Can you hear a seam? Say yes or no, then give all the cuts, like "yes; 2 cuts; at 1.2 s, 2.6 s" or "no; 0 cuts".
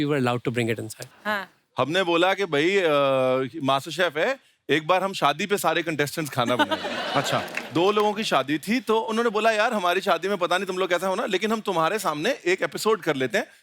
yes; 1 cut; at 1.0 s